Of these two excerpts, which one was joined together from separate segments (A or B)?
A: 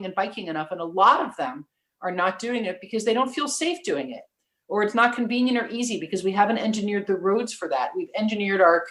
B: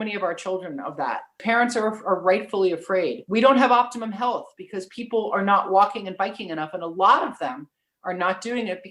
B